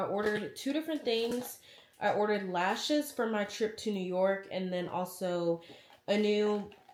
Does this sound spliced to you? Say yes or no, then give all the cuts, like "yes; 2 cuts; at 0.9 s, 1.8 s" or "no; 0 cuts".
no; 0 cuts